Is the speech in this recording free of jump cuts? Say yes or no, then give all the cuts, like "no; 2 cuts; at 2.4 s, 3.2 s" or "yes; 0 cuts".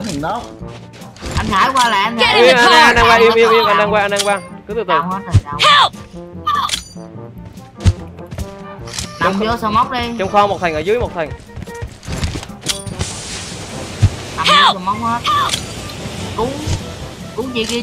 yes; 0 cuts